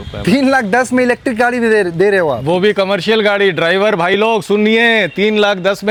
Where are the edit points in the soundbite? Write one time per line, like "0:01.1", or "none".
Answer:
none